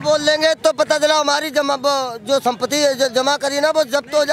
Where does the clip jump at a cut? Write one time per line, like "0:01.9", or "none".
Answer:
none

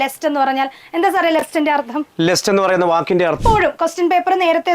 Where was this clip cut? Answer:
0:03.4

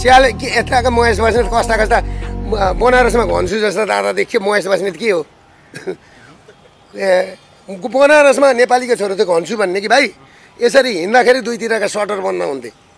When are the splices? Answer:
none

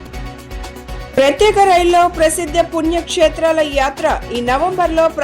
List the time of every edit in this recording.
0:01.1

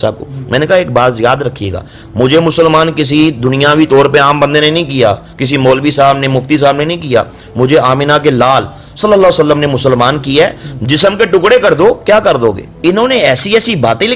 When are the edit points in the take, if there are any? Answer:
0:12.7

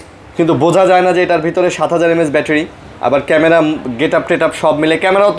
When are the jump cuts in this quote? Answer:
none

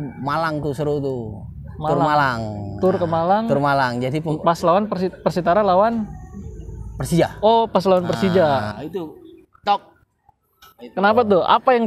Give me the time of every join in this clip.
none

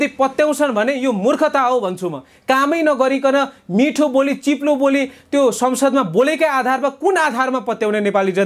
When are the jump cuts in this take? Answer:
none

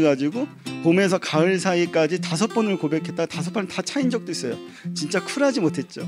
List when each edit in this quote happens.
none

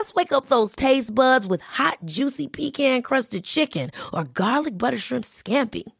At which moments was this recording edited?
none

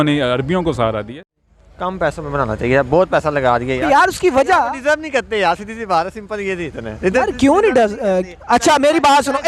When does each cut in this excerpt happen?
0:01.1

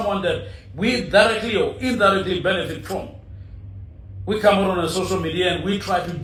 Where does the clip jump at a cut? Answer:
none

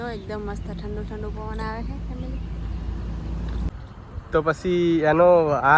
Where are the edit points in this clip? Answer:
0:03.7

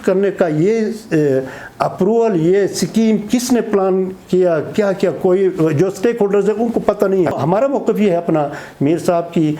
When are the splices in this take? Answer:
0:07.3

